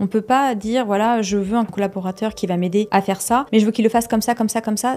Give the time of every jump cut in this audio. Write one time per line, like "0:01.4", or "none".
0:01.7
0:03.2

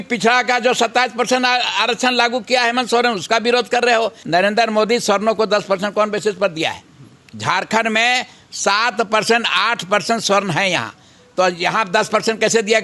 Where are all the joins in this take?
0:04.2

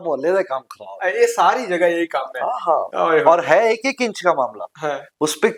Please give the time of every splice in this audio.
none

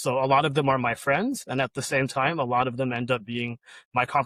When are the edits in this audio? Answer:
none

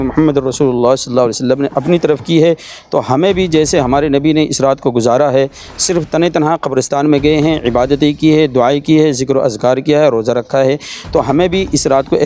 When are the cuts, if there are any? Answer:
none

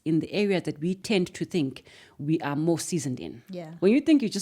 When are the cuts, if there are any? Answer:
0:01.0

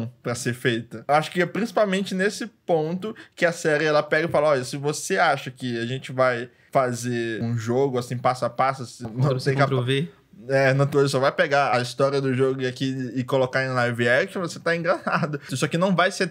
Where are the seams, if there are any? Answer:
0:01.1
0:09.0
0:10.9
0:15.5

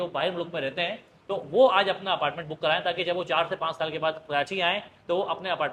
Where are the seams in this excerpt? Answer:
none

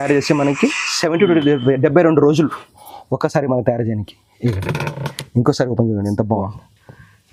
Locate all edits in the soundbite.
none

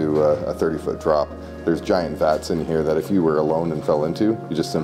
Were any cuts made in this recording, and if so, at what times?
none

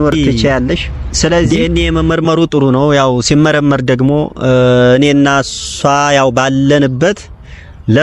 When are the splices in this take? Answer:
0:01.5

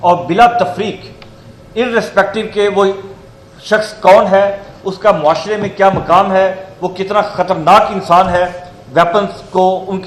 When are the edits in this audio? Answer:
none

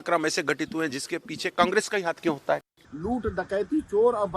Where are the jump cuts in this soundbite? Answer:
0:02.7

